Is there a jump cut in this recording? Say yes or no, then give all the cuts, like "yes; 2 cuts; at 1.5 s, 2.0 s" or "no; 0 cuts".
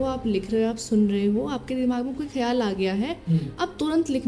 no; 0 cuts